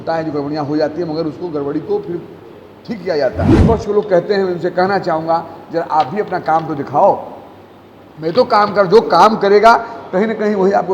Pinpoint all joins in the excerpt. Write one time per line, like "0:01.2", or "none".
0:03.6